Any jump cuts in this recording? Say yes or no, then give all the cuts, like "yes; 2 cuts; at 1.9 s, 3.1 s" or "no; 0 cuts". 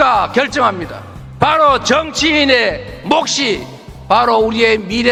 no; 0 cuts